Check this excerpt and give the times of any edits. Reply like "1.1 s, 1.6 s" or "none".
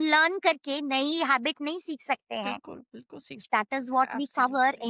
3.3 s